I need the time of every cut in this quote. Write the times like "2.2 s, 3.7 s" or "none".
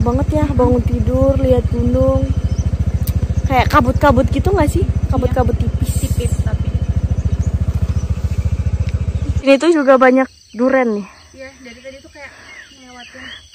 9.4 s